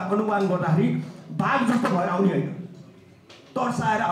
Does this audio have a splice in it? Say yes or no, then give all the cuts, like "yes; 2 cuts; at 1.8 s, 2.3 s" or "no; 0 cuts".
no; 0 cuts